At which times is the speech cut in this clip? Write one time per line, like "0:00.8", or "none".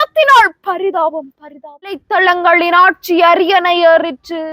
0:02.0